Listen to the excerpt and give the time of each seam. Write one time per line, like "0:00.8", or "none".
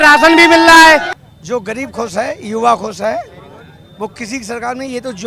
0:01.2